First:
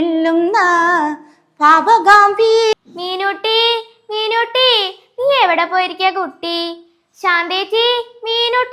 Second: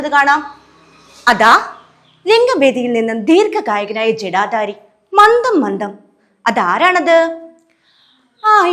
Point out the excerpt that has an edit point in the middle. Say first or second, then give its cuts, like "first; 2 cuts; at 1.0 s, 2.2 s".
first; 1 cut; at 2.7 s